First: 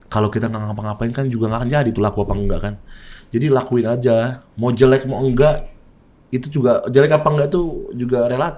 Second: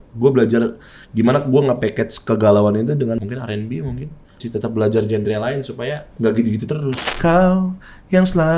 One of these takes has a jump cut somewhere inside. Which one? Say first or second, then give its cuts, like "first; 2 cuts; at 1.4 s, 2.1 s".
second; 4 cuts; at 3.2 s, 4.4 s, 6.0 s, 7.0 s